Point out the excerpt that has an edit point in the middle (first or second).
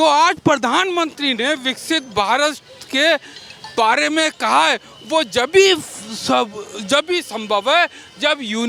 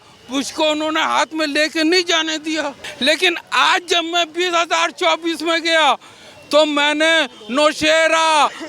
second